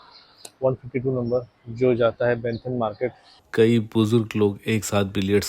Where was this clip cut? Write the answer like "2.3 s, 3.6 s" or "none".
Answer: 3.4 s